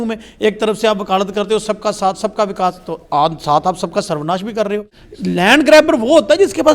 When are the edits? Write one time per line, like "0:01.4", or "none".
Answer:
0:05.0